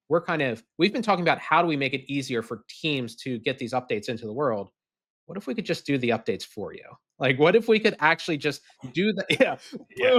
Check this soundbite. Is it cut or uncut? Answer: uncut